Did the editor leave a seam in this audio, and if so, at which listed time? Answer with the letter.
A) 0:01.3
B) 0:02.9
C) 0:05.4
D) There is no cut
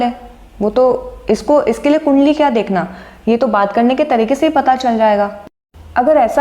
C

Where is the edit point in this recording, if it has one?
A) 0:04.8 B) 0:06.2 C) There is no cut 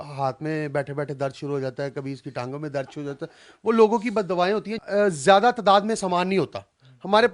A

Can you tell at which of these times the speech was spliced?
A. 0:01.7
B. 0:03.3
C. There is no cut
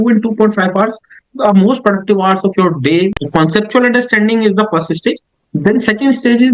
B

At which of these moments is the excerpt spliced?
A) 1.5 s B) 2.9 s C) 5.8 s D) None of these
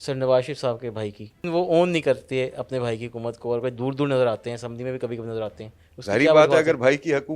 A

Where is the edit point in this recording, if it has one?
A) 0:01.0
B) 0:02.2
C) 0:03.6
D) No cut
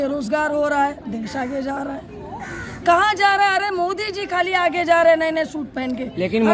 D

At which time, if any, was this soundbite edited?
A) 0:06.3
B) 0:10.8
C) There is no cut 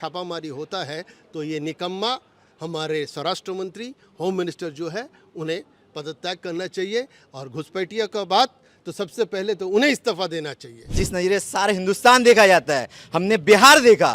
B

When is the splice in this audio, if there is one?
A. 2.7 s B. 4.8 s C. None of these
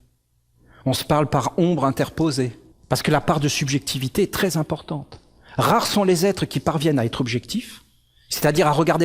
A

